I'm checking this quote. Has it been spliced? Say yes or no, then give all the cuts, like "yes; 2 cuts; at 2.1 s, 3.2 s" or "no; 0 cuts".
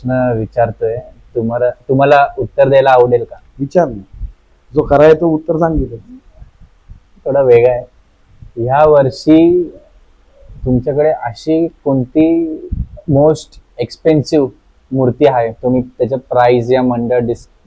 no; 0 cuts